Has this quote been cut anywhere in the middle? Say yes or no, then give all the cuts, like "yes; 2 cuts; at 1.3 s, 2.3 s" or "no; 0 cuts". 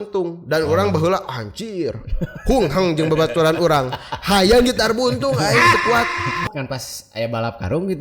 yes; 1 cut; at 6.4 s